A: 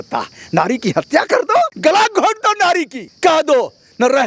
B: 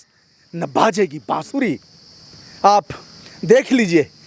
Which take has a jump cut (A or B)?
A